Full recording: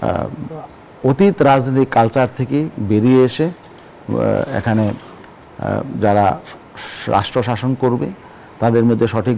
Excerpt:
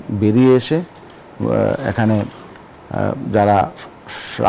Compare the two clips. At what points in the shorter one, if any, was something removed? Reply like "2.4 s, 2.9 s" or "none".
none